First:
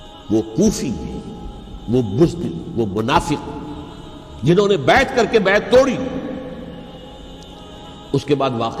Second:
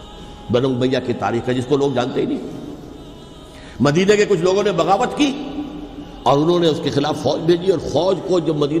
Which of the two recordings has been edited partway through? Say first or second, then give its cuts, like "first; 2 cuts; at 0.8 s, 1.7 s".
first; 1 cut; at 7.0 s